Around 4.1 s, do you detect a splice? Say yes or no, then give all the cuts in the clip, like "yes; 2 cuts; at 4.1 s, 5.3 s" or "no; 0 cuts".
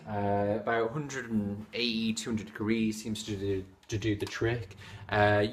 yes; 1 cut; at 4.1 s